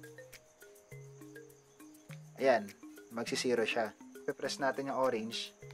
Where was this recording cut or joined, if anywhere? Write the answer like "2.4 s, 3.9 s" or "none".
4.3 s